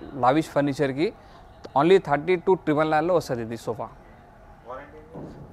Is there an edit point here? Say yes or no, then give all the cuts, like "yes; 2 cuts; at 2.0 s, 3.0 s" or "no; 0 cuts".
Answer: no; 0 cuts